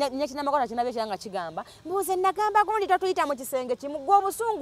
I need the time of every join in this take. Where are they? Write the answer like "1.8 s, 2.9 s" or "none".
none